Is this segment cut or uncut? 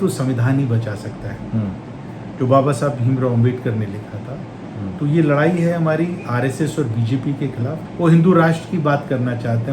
cut